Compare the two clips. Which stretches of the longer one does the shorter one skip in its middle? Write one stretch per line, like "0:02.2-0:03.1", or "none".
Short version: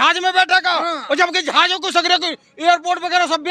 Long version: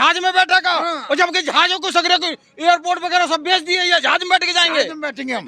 none